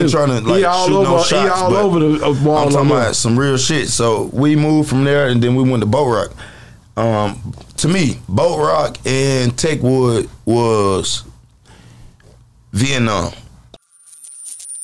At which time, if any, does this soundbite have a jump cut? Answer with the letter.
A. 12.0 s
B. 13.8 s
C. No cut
B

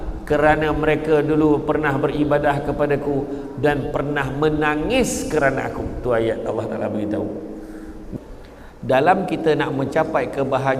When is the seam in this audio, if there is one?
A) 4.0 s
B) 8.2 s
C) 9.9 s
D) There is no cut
B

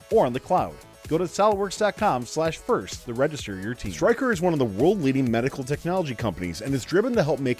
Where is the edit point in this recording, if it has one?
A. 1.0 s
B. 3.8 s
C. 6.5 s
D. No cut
B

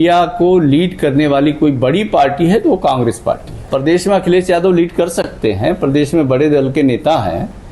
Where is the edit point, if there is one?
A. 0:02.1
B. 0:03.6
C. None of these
B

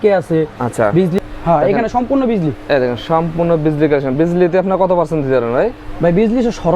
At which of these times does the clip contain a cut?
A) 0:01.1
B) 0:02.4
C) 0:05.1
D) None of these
A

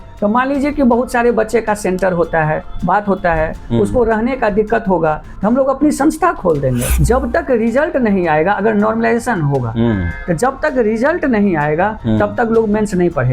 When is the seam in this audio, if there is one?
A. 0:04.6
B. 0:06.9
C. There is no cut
B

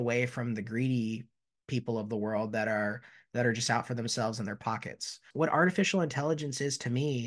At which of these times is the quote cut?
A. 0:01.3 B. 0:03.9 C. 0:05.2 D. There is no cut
C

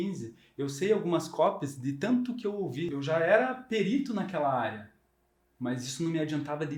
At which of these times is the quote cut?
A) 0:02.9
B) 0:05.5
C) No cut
A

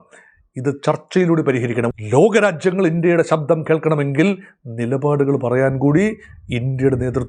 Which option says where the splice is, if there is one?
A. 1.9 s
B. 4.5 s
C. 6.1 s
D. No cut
A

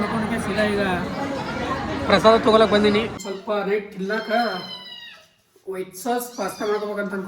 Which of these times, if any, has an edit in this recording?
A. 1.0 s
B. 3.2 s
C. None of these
B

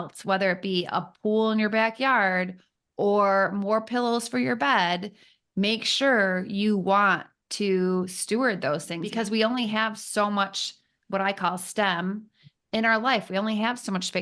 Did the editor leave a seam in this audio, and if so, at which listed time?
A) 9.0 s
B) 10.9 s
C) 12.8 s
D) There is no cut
A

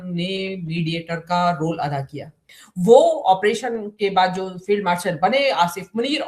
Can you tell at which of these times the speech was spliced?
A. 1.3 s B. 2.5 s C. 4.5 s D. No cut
B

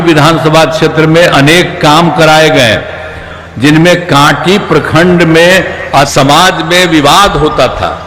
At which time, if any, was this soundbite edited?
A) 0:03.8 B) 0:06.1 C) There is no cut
B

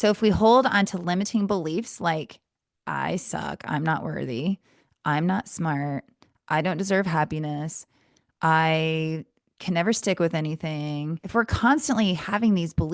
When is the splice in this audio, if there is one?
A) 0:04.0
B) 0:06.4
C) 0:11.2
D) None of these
C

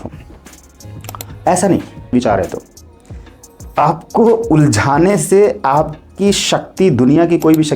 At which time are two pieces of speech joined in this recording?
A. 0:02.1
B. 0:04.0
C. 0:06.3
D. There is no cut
A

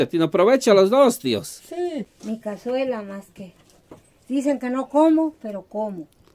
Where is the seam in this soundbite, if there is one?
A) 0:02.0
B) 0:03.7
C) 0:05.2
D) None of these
A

